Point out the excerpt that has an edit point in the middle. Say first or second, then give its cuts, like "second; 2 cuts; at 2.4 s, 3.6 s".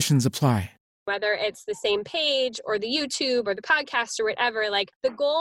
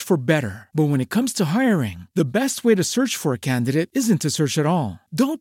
first; 1 cut; at 1.1 s